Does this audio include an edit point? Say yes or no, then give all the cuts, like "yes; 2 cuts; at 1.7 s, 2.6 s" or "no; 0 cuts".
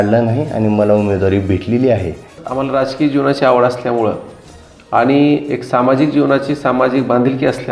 yes; 1 cut; at 2.4 s